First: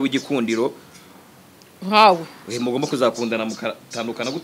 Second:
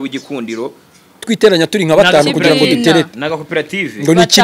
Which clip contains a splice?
second; 1 cut; at 1.2 s

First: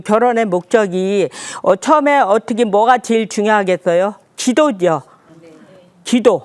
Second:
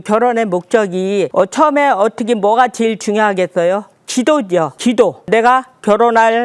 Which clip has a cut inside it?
second; 2 cuts; at 1.3 s, 5.2 s

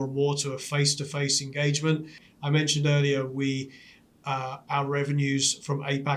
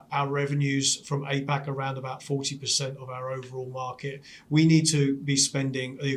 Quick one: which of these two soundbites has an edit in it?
first; 1 cut; at 2.2 s

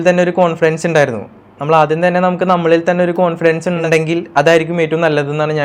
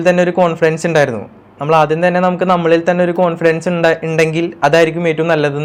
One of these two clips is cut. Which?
first; 1 cut; at 3.8 s

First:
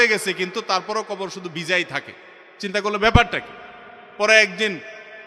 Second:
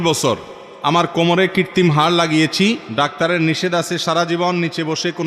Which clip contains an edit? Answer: second; 1 cut; at 2.9 s

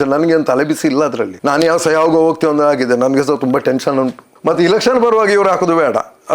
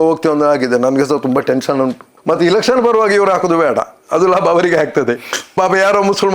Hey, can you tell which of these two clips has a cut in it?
second; 1 cut; at 5.3 s

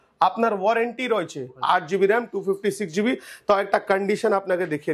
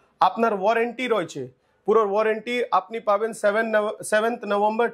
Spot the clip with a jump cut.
first; 1 cut; at 1.5 s

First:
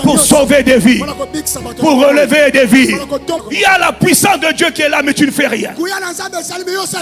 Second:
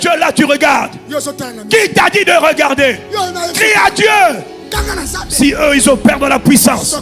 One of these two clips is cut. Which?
first; 1 cut; at 3.4 s

